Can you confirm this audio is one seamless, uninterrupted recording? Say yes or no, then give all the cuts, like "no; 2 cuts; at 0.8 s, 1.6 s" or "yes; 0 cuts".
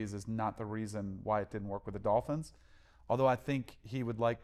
yes; 0 cuts